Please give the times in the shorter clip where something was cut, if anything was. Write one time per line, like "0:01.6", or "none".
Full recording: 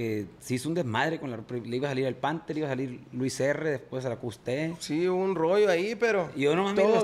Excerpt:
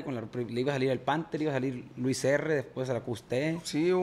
none

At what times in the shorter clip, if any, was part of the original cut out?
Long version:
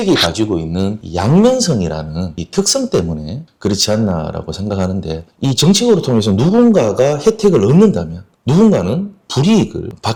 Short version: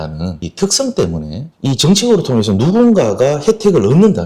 0:01.5

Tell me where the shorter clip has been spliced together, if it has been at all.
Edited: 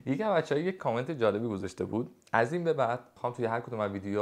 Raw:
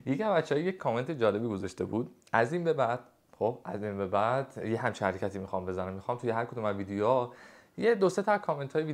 0:03.1

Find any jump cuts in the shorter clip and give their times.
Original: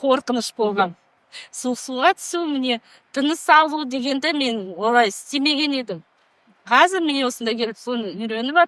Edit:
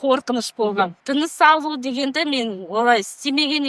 0:01.0

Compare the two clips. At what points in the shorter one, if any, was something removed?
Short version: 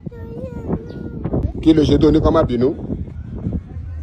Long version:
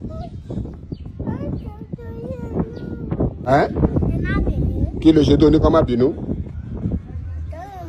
0:01.5

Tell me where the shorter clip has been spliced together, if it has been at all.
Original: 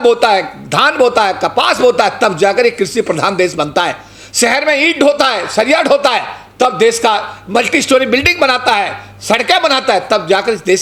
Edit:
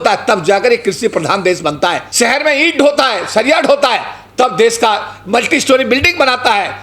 0:02.1

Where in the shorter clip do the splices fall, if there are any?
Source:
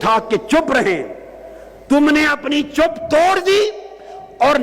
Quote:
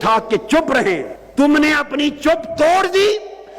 0:01.2

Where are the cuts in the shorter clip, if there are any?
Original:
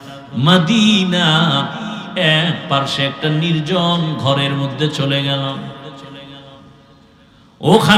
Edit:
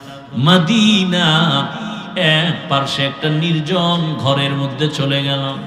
none

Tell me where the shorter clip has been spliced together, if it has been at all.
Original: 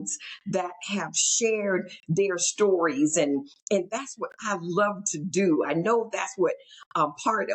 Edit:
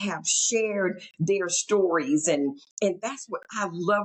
none

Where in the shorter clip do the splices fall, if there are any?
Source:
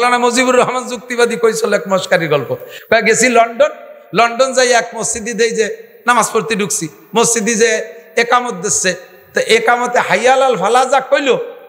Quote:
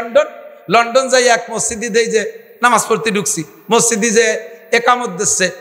none

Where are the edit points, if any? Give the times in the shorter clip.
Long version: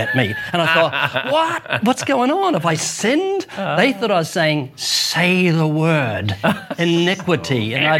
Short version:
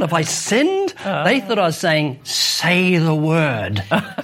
none

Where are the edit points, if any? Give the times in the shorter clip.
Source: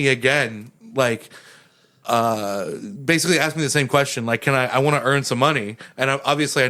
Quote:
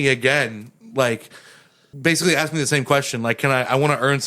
0:01.9

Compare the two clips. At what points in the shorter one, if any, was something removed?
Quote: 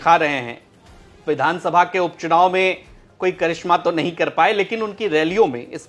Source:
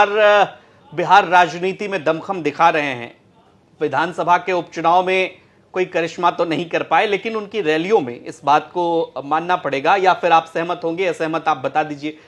none

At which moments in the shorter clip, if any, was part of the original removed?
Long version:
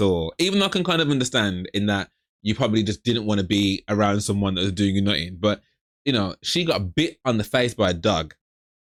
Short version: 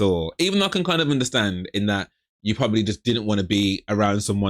none

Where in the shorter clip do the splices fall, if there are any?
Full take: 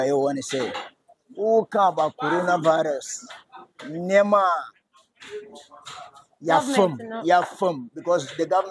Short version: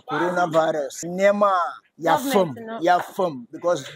0:01.0
0:01.8

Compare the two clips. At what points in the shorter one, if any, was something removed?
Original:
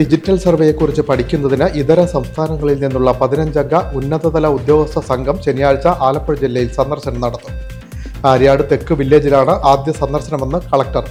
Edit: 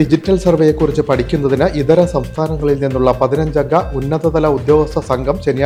none

